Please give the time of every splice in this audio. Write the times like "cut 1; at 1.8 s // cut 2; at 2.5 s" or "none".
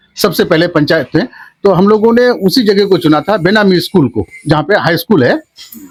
none